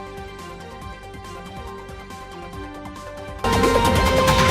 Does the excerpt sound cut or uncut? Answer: cut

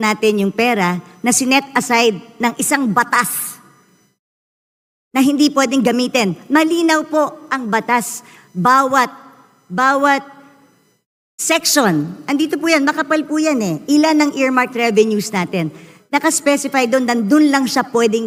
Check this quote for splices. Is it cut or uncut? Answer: uncut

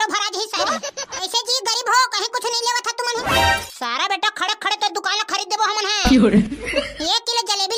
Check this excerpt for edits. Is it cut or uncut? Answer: cut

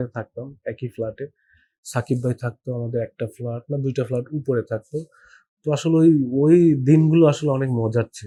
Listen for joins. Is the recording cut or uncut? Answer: uncut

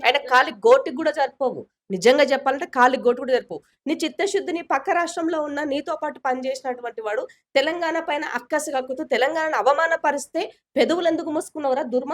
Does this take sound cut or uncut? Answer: cut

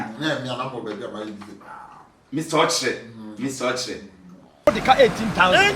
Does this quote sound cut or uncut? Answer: cut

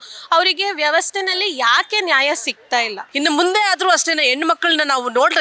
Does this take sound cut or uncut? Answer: cut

